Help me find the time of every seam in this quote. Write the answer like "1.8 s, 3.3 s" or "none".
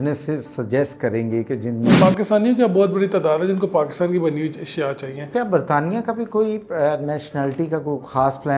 2.0 s, 5.3 s